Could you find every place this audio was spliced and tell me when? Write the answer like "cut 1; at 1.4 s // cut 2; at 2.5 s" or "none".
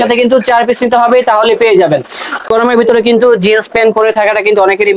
cut 1; at 2.5 s

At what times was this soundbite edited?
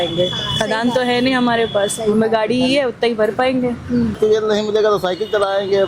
cut 1; at 4.2 s

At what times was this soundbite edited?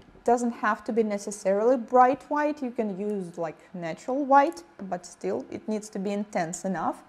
cut 1; at 3.0 s

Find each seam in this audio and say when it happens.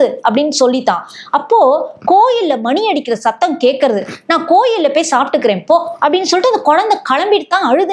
none

